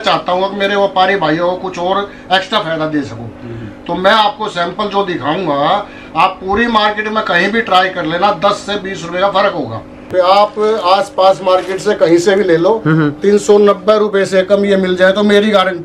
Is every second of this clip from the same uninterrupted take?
no; 1 cut; at 10.1 s

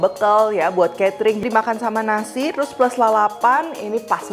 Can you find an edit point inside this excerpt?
yes; 1 cut; at 1.4 s

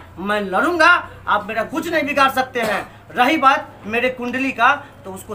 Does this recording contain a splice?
no; 0 cuts

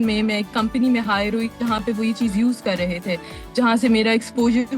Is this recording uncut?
yes; 0 cuts

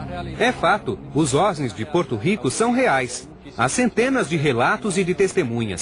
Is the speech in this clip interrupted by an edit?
no; 0 cuts

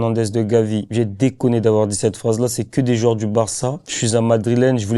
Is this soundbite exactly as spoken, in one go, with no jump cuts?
no; 1 cut; at 3.9 s

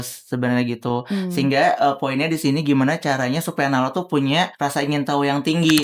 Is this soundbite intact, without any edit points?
no; 1 cut; at 4.5 s

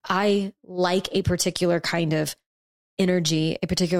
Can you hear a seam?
no; 0 cuts

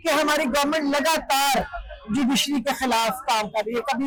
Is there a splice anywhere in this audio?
no; 0 cuts

